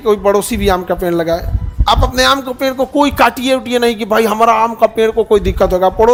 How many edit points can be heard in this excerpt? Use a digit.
0